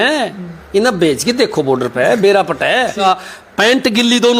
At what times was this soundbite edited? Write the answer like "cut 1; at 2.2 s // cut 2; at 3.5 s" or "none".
cut 1; at 3.0 s